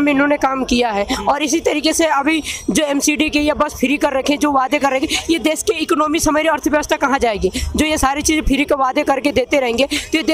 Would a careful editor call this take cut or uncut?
uncut